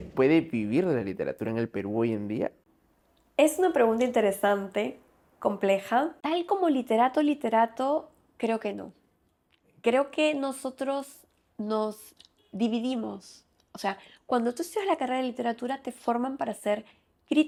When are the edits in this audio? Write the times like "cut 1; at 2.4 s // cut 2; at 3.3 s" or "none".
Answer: none